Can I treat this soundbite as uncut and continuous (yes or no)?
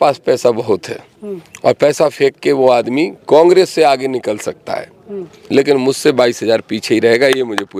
yes